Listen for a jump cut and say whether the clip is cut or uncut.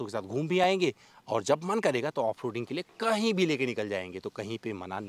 uncut